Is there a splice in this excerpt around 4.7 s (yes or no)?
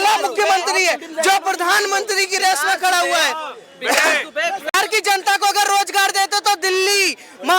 yes